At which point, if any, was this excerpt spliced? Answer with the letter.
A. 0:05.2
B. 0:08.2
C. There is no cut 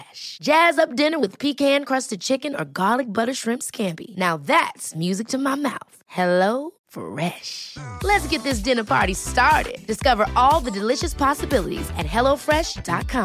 C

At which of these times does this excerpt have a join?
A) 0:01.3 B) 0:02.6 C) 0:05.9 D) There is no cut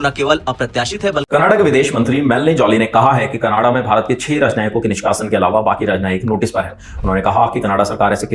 A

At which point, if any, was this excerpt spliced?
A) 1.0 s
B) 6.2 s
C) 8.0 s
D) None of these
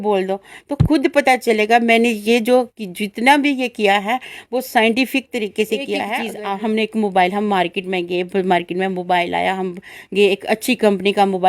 B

